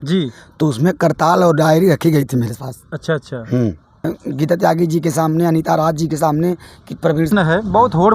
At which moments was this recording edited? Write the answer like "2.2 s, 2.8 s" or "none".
4.1 s, 7.3 s